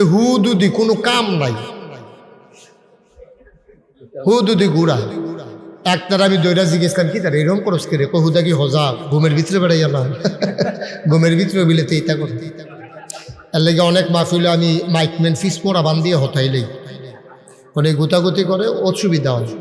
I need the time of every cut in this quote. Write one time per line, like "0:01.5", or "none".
none

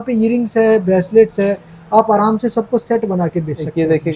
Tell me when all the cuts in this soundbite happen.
none

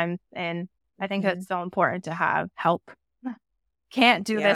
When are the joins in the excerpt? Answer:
0:02.5

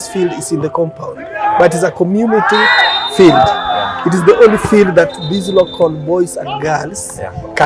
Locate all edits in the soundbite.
none

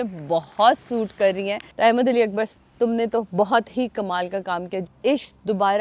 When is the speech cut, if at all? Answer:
0:01.6
0:04.8

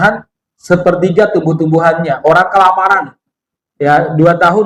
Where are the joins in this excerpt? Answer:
none

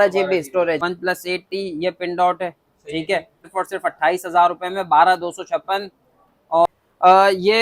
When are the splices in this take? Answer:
0:00.8
0:03.4
0:06.7

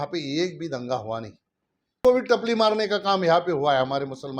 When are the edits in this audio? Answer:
0:02.0

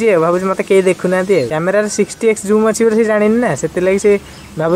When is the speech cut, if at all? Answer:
0:01.5

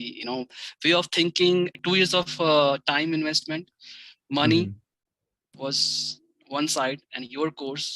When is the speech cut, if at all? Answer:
0:01.8

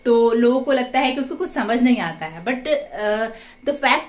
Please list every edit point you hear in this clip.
none

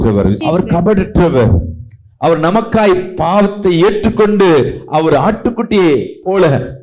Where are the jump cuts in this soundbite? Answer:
none

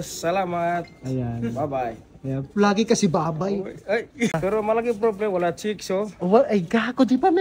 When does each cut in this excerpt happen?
0:04.3

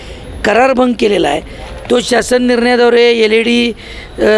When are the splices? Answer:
none

